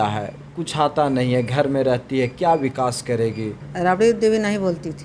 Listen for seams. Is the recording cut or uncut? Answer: cut